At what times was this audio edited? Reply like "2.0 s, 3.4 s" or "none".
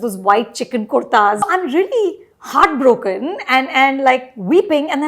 1.4 s